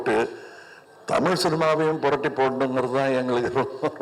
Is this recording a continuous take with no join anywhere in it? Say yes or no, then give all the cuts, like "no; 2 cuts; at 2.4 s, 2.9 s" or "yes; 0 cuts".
yes; 0 cuts